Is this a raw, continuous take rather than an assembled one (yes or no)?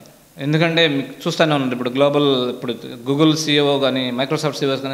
yes